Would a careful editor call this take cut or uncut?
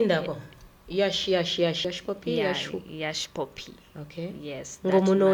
cut